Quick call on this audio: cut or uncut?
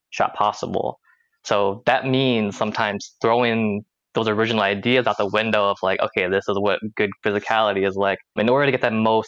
cut